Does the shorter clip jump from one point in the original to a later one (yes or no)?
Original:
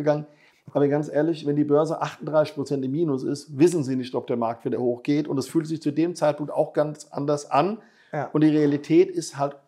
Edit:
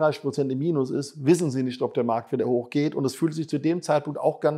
no